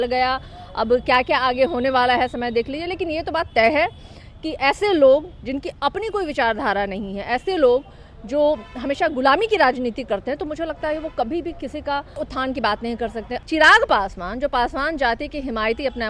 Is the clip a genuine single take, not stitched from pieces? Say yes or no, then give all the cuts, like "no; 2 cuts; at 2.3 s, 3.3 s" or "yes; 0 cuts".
no; 2 cuts; at 12.2 s, 13.4 s